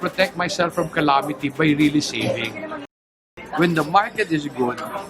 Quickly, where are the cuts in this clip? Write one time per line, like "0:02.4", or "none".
0:03.0